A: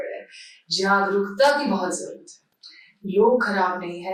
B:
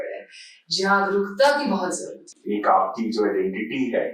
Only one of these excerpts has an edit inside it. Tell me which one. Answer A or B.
B